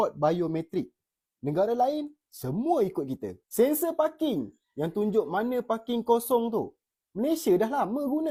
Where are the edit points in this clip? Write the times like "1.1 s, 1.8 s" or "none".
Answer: none

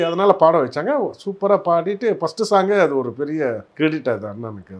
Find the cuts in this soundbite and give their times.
3.7 s

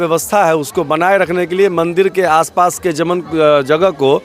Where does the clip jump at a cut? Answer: none

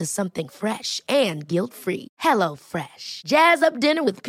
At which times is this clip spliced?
none

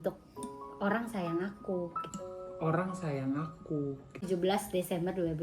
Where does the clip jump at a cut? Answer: 4.2 s

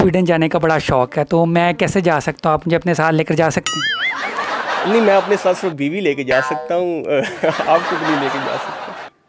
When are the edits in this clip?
none

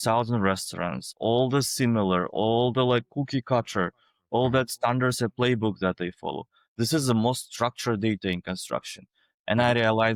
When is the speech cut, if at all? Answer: none

